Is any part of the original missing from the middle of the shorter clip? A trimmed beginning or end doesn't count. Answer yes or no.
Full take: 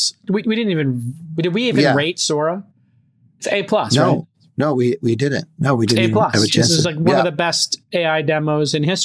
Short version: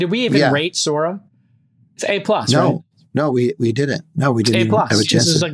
no